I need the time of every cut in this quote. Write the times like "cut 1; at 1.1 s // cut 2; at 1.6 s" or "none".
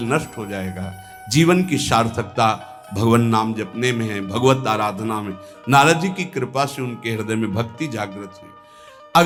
none